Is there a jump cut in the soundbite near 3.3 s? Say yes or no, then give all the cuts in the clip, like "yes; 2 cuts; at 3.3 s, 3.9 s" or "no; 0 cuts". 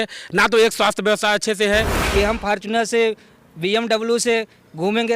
no; 1 cut; at 2.0 s